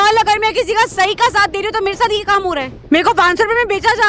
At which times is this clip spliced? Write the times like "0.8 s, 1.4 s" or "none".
2.8 s